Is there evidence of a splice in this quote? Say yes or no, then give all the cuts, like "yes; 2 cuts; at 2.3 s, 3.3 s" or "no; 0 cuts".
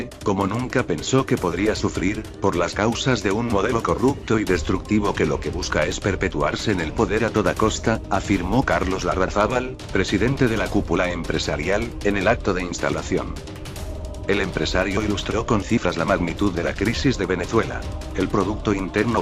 yes; 1 cut; at 8.2 s